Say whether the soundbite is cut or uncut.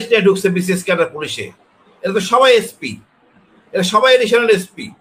uncut